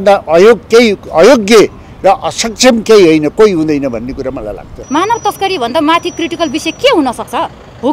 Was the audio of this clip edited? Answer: yes; 1 cut; at 4.7 s

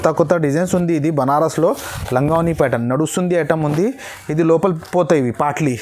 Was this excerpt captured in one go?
yes; 0 cuts

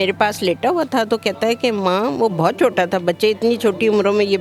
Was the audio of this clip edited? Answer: no; 0 cuts

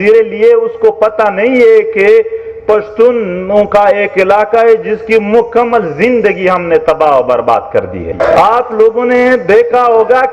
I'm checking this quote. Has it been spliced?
yes; 1 cut; at 8.1 s

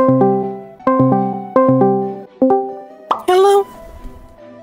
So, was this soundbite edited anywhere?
yes; 2 cuts; at 0.8 s, 2.2 s

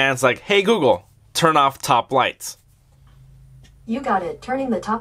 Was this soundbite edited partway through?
no; 0 cuts

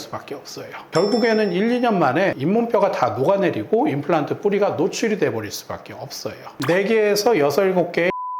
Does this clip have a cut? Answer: yes; 2 cuts; at 2.4 s, 6.6 s

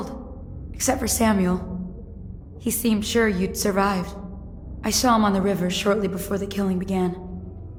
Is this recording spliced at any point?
no; 0 cuts

